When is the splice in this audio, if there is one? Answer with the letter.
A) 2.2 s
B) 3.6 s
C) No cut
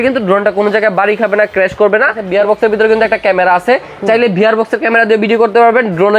A